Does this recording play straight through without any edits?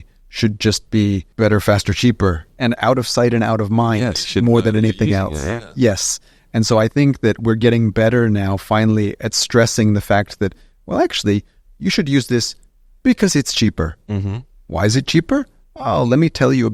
no; 2 cuts; at 1.3 s, 2.5 s

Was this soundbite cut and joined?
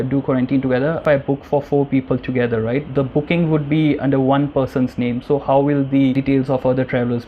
yes; 2 cuts; at 1.0 s, 6.1 s

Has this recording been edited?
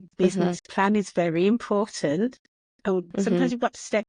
no; 0 cuts

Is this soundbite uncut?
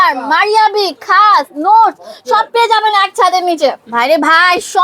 no; 1 cut; at 3.8 s

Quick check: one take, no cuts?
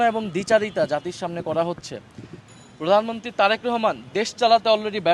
no; 1 cut; at 2.4 s

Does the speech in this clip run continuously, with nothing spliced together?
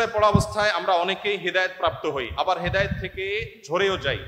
yes; 0 cuts

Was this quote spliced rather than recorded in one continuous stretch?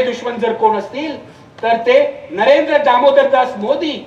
no; 0 cuts

